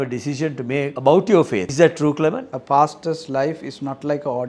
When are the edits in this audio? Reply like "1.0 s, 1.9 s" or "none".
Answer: 0.9 s, 1.7 s, 2.5 s